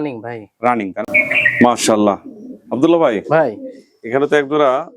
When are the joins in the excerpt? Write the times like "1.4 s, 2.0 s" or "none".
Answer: 1.1 s